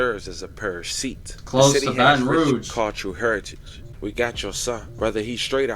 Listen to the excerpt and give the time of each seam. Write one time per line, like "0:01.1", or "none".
0:03.8